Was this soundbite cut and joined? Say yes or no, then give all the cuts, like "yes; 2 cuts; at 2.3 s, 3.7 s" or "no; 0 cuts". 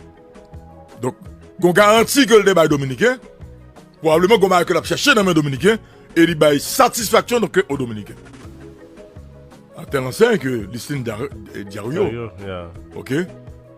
yes; 1 cut; at 1.0 s